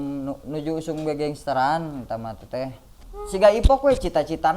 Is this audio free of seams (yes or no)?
no